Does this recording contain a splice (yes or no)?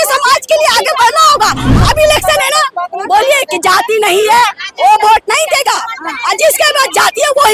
yes